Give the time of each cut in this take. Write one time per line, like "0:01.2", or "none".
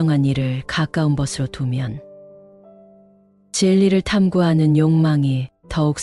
none